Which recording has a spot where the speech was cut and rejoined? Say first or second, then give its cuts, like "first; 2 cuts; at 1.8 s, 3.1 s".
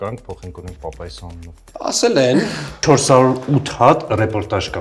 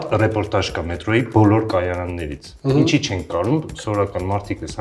first; 2 cuts; at 1.6 s, 2.8 s